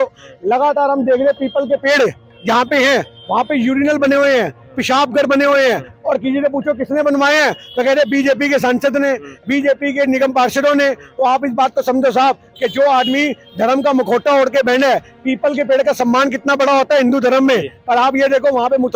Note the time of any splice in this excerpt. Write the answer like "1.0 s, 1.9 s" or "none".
none